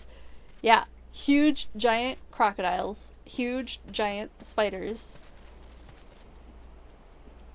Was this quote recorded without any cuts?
yes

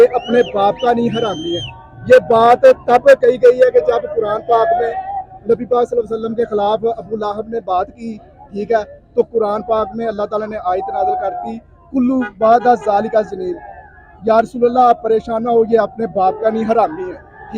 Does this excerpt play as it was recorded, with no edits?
yes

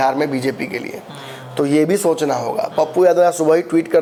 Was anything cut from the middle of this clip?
no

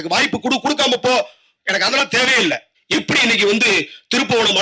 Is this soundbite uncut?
no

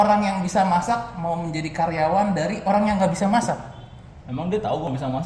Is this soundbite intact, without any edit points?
yes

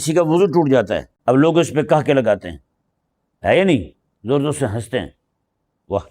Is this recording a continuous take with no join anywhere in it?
no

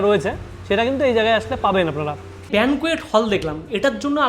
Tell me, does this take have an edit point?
yes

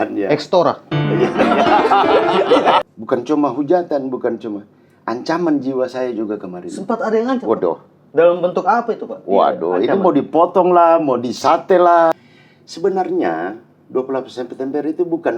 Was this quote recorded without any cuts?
no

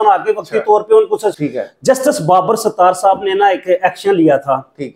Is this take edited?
yes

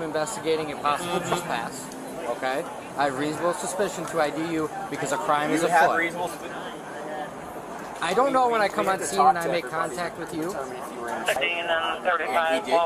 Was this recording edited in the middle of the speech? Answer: no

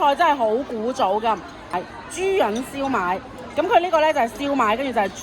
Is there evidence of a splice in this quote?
yes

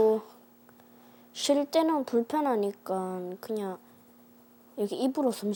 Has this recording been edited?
no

